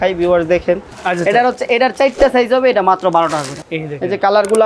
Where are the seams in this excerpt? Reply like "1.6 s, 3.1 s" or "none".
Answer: 0.9 s, 3.6 s